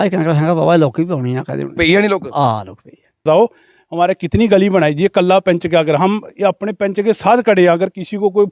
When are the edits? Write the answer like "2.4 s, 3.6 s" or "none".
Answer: 3.2 s